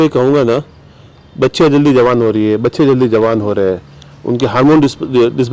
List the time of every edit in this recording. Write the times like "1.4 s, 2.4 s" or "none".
none